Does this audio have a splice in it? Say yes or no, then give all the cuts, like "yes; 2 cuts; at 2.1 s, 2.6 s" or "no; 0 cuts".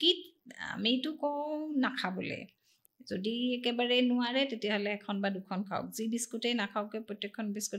no; 0 cuts